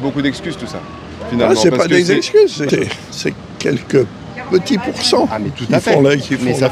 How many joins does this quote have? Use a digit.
1